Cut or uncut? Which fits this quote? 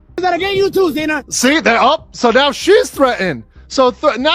uncut